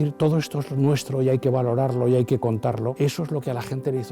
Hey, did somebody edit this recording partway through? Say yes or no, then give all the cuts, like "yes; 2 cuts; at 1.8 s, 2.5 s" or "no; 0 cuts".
yes; 1 cut; at 2.9 s